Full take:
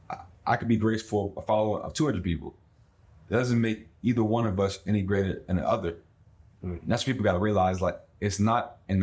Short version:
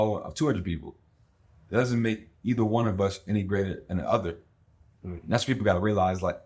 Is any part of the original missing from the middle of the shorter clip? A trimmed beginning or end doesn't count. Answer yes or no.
no